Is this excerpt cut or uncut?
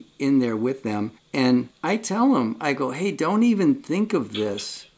cut